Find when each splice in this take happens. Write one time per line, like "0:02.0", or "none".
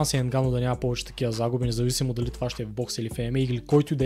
none